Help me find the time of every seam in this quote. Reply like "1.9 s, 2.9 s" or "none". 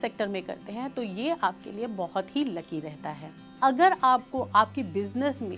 3.5 s